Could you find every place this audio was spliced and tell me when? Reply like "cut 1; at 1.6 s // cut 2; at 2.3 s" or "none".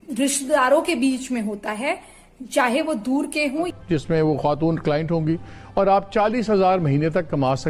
cut 1; at 3.7 s